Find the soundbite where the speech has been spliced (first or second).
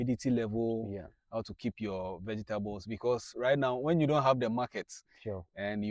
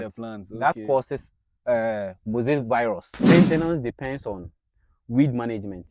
second